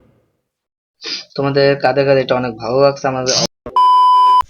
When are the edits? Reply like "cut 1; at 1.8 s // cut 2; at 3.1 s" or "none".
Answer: cut 1; at 3.4 s